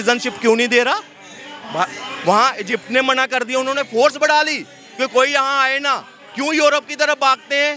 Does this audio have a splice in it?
no; 0 cuts

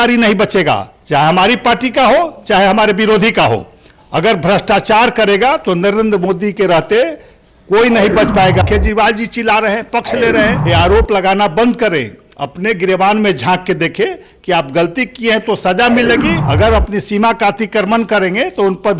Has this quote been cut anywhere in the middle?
yes; 3 cuts; at 8.6 s, 10.6 s, 16.4 s

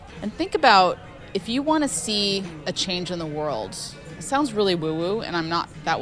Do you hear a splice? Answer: no; 0 cuts

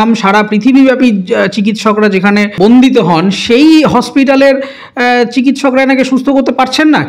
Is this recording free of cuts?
no; 1 cut; at 2.5 s

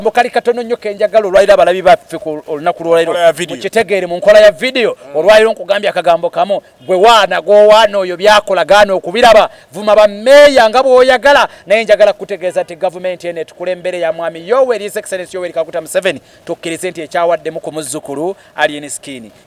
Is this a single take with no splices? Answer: yes; 0 cuts

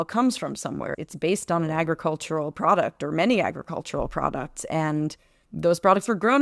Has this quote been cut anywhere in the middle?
no; 0 cuts

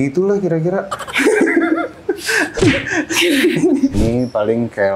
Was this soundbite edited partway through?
yes; 1 cut; at 3.9 s

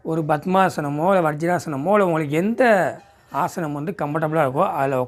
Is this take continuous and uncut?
yes; 0 cuts

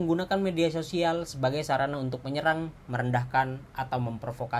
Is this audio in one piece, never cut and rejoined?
yes; 0 cuts

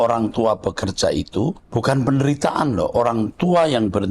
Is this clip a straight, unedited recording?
no; 1 cut; at 1.6 s

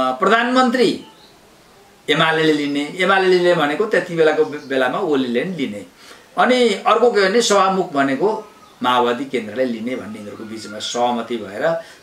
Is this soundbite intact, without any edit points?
yes; 0 cuts

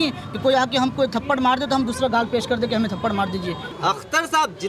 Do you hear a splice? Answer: yes; 1 cut; at 3.7 s

